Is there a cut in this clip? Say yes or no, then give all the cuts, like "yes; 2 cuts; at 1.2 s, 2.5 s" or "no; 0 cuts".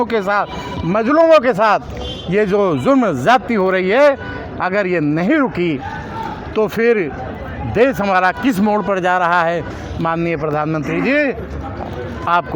no; 0 cuts